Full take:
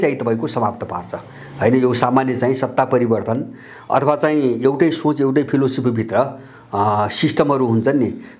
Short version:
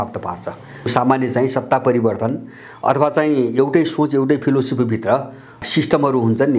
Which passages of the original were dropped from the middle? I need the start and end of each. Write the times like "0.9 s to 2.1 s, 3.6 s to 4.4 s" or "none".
1.5 s to 1.9 s, 6.7 s to 7.1 s